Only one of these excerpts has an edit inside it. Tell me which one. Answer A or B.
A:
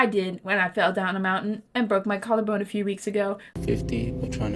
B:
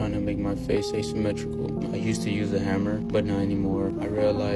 A